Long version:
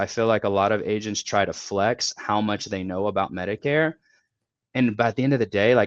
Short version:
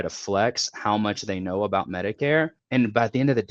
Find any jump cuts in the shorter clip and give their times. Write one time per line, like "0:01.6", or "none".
0:02.6